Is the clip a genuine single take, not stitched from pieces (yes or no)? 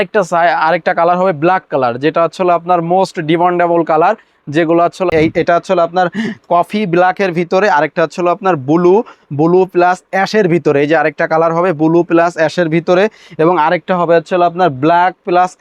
no